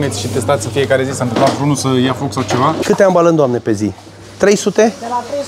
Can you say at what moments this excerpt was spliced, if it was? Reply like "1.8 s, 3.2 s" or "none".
2.8 s